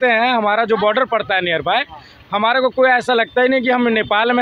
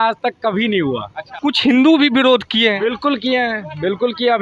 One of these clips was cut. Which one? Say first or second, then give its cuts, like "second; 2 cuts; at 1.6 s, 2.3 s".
second; 1 cut; at 1.2 s